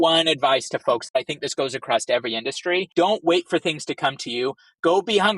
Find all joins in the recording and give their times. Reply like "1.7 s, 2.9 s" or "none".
1.2 s, 2.9 s